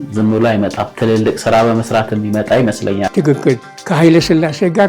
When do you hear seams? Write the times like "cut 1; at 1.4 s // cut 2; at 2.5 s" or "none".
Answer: cut 1; at 0.9 s // cut 2; at 3.7 s